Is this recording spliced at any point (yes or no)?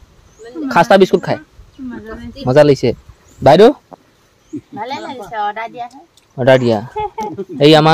no